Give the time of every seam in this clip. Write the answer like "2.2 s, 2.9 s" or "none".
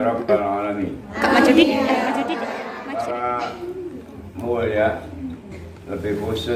2.5 s